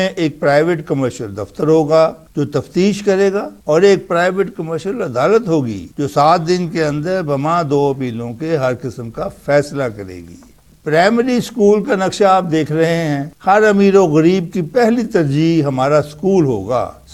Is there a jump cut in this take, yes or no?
yes